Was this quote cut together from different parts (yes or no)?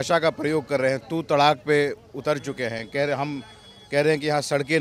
no